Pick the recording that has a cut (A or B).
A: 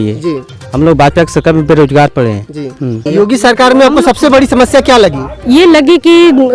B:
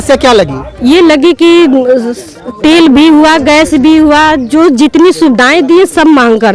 A